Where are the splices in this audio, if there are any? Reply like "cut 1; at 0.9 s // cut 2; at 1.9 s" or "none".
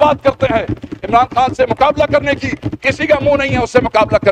none